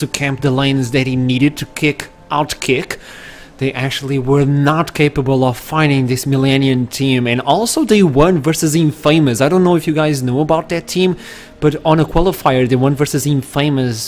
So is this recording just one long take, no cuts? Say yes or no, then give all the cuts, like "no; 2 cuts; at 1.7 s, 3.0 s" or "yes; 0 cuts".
yes; 0 cuts